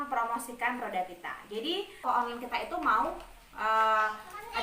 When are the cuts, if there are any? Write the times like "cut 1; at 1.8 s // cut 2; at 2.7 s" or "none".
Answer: cut 1; at 2.0 s